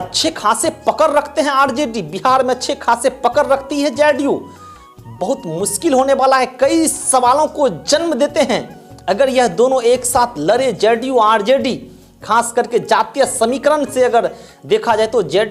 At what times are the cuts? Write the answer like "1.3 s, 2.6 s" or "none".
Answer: none